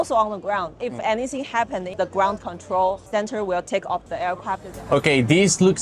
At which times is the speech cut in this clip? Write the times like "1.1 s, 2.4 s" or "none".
1.9 s, 3.1 s, 4.7 s